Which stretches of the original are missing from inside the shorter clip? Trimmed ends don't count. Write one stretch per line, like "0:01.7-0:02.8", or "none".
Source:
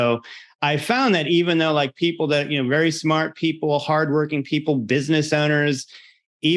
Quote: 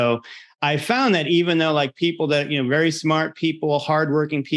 none